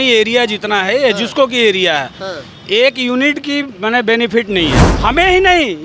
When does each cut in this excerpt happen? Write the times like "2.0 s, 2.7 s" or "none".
4.9 s